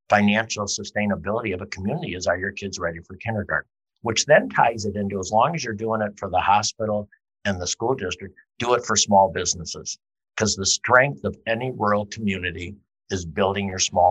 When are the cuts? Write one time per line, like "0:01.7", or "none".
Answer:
0:03.8

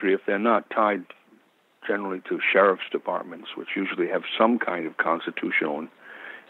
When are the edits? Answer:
none

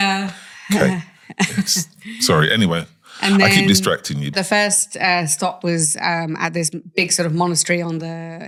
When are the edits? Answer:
none

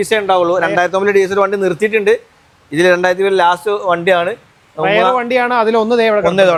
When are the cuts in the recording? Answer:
none

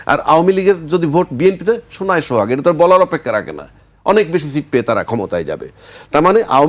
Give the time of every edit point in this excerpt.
none

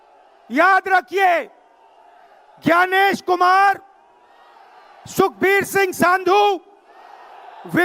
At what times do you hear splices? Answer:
none

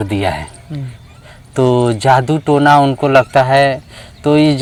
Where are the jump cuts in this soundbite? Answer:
none

